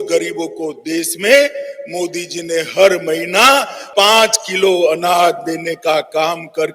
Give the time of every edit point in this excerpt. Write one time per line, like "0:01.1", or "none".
0:03.8